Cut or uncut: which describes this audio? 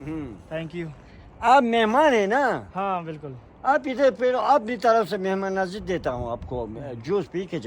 uncut